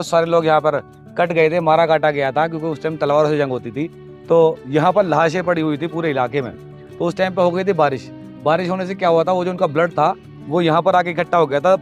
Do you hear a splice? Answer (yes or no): no